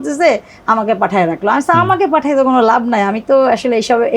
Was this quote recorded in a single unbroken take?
yes; 0 cuts

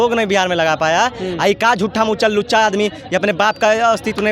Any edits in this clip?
no; 0 cuts

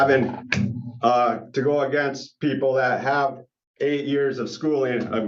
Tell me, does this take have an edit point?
no; 0 cuts

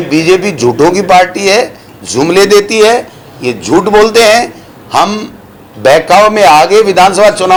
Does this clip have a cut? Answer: no; 0 cuts

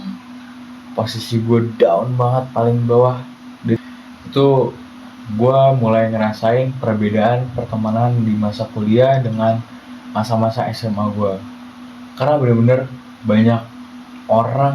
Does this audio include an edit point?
yes; 1 cut; at 3.8 s

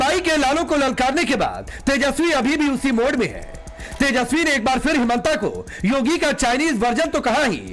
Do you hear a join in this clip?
no; 0 cuts

